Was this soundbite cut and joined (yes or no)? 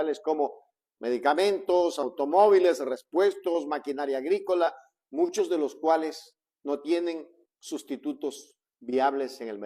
no